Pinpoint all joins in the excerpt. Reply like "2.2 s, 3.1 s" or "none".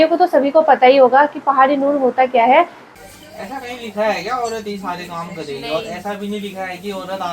2.8 s